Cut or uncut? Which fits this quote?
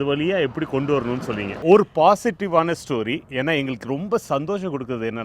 cut